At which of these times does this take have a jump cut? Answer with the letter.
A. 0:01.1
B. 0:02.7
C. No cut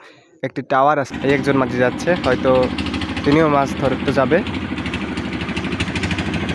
A